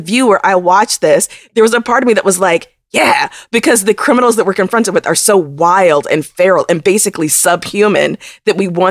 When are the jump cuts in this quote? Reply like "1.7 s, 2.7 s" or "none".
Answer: 1.4 s